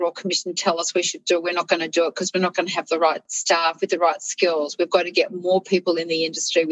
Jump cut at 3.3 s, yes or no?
yes